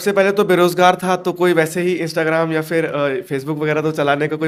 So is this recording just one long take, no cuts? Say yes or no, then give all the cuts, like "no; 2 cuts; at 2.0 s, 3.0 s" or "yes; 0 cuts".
yes; 0 cuts